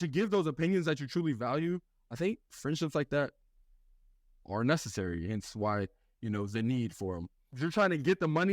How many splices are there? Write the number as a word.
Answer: one